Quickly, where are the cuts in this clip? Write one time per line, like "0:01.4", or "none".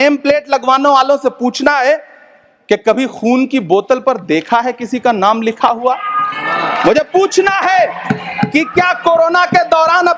none